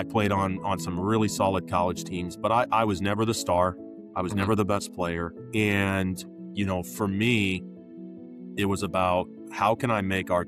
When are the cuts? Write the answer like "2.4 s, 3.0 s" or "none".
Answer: none